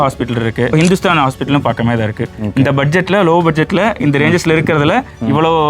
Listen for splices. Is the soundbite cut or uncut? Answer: cut